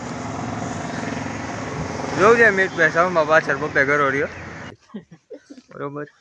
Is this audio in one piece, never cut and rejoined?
no; 1 cut; at 4.8 s

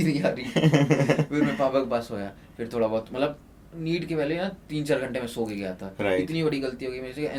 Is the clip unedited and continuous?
yes; 0 cuts

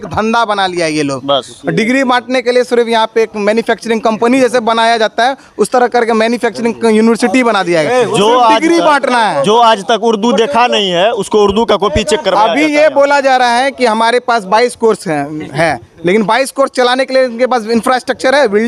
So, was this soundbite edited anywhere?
no; 0 cuts

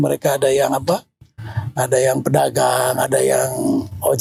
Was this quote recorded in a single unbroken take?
yes; 0 cuts

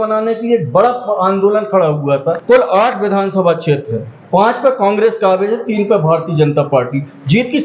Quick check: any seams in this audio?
yes; 1 cut; at 2.4 s

